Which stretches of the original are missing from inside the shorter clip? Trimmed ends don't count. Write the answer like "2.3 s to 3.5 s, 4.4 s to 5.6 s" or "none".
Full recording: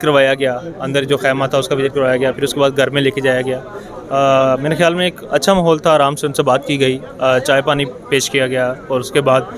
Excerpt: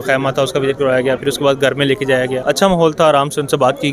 3.5 s to 5.2 s